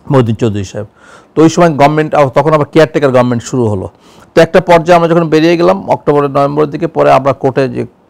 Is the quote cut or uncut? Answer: uncut